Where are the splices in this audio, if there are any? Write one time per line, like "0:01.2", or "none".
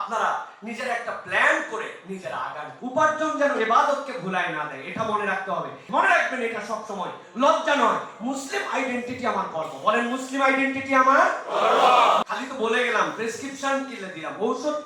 0:02.7
0:05.8
0:12.3